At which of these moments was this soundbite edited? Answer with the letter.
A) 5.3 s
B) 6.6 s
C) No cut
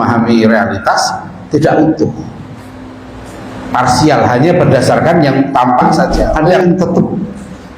B